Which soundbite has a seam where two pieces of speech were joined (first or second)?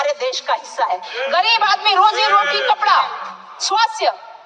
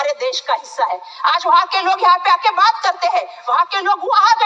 first